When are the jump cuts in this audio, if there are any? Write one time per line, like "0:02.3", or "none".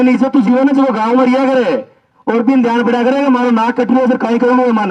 none